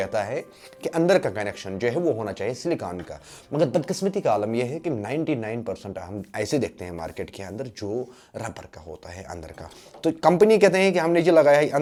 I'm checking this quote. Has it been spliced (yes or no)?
no